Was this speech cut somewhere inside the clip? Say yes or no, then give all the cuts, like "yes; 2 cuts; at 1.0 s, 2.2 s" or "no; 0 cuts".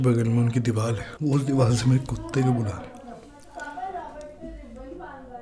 yes; 1 cut; at 1.1 s